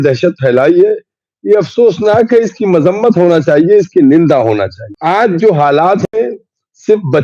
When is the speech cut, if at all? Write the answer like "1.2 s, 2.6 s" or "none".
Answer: 4.8 s